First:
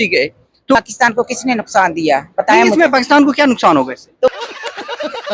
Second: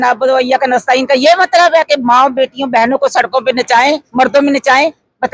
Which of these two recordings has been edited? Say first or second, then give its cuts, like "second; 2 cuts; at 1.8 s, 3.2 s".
first; 2 cuts; at 0.8 s, 4.3 s